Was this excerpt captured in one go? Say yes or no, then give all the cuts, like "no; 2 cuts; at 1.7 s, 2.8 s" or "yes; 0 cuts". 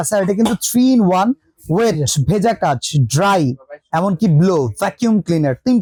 yes; 0 cuts